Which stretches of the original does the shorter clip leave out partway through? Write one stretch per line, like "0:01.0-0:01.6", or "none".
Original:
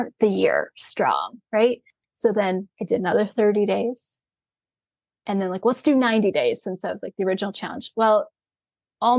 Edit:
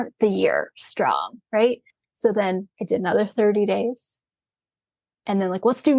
none